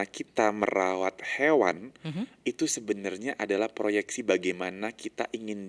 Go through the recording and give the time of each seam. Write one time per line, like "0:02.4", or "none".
none